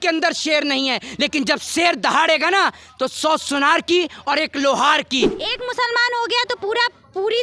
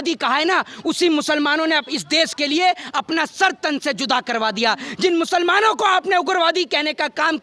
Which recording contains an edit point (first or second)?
first